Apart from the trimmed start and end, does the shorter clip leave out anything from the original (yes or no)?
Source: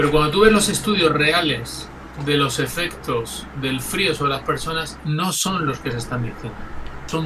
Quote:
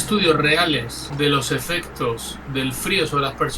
yes